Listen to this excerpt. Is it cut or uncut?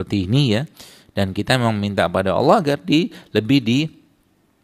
uncut